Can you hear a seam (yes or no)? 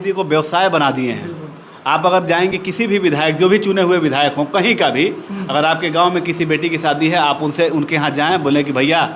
no